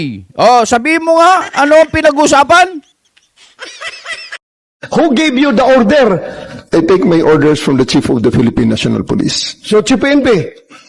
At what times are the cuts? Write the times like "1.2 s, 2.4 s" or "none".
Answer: 4.5 s